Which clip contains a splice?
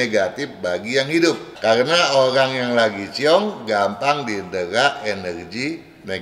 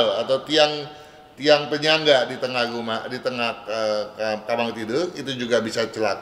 first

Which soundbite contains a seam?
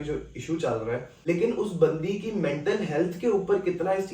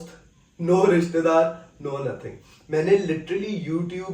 first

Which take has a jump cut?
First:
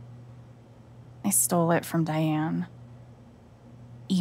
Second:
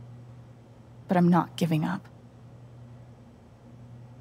second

